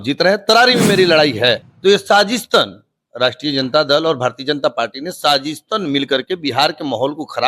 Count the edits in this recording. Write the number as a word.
one